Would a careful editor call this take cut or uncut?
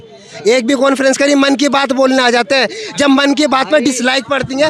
uncut